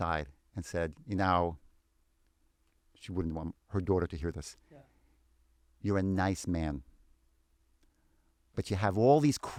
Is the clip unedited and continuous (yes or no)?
yes